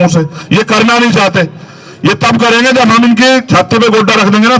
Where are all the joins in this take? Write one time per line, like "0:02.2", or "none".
none